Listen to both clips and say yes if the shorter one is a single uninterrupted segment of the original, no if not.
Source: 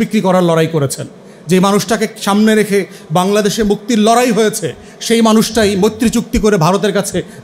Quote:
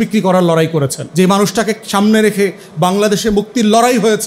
no